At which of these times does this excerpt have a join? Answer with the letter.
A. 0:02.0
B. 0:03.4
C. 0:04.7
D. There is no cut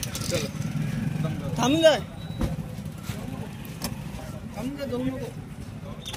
D